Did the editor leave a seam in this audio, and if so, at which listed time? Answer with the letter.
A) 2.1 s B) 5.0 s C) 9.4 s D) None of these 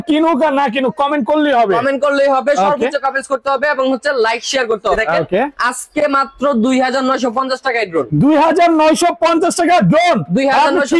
B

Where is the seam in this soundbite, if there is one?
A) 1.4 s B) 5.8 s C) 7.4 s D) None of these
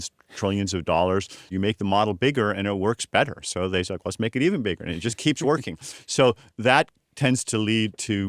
A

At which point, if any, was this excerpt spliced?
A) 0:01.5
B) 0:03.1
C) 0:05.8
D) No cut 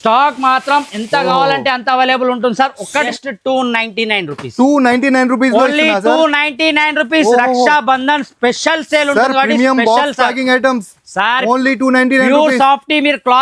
B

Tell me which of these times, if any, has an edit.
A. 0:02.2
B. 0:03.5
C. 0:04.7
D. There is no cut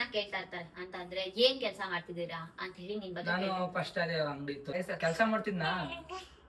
C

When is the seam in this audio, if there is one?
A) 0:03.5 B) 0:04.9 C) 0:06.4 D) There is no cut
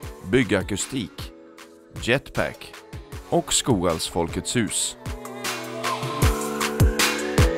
B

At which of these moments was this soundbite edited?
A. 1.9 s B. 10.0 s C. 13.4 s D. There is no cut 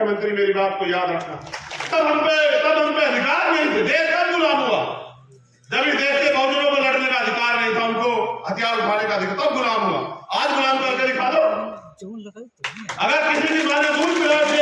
A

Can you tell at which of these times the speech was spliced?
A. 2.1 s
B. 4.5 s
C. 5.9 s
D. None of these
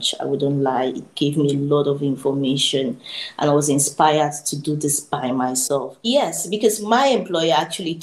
C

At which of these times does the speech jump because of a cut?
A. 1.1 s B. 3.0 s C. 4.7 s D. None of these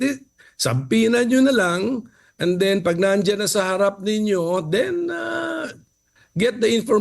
A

